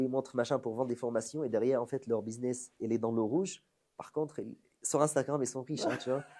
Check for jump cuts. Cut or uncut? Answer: uncut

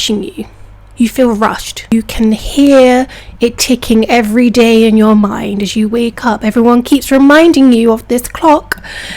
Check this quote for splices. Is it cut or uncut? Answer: cut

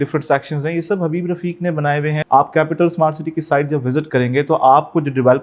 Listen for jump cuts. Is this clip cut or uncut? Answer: cut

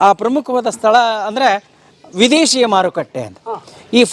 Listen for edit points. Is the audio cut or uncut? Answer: uncut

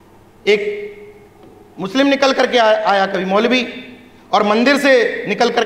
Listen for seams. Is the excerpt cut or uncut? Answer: uncut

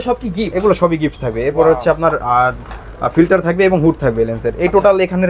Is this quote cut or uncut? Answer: uncut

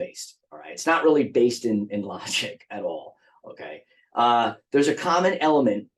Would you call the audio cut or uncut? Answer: uncut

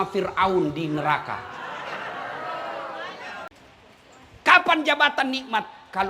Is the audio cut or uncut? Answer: cut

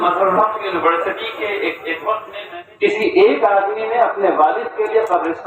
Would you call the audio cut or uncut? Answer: cut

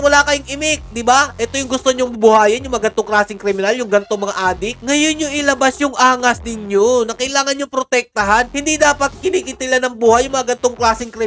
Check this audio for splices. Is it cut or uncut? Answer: uncut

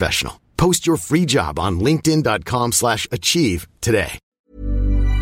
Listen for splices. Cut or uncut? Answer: cut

